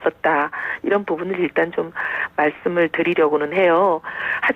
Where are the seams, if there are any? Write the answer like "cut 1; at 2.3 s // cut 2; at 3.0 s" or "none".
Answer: cut 1; at 3.6 s